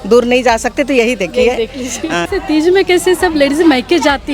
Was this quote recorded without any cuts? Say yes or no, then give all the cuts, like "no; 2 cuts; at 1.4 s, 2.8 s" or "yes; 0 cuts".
no; 1 cut; at 2.3 s